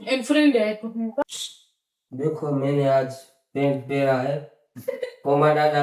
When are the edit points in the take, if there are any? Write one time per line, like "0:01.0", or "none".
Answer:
0:01.3